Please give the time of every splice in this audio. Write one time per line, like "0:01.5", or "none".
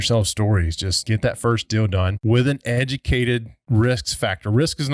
0:00.9
0:02.1
0:03.6